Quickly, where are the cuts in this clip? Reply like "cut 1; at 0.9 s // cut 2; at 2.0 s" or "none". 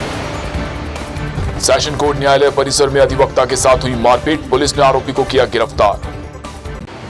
none